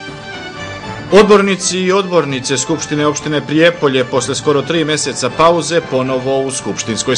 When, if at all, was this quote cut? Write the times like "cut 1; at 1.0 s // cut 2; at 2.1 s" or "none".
cut 1; at 1.0 s